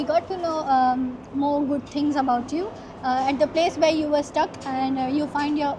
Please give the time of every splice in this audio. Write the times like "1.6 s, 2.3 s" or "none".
none